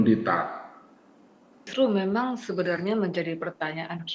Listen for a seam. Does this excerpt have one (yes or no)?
yes